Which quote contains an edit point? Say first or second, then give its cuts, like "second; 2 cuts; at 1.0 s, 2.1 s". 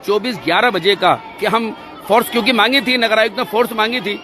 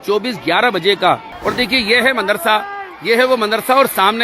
second; 1 cut; at 1.3 s